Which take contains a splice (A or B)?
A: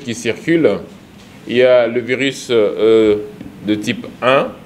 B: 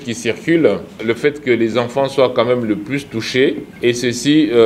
B